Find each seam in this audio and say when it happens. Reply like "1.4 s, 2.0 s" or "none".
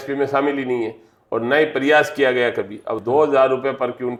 none